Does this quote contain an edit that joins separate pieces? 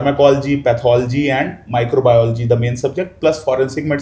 no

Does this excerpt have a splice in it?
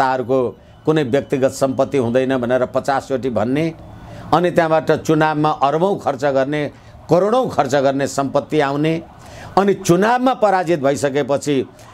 no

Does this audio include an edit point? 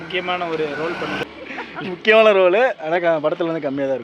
yes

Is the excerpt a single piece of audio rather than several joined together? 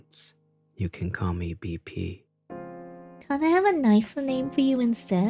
no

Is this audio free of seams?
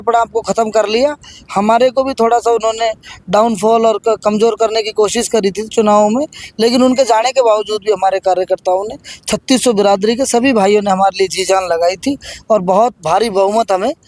yes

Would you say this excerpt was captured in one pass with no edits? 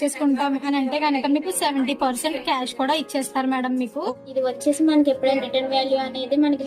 no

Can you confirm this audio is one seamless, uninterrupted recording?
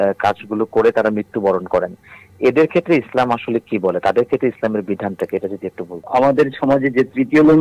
no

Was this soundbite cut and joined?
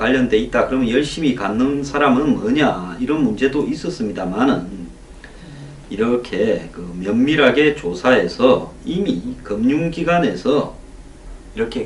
no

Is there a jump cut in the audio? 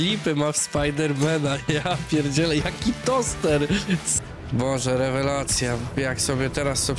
yes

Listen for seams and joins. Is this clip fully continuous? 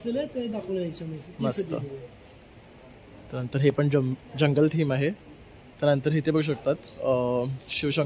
yes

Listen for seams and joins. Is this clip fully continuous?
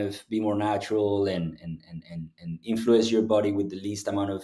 yes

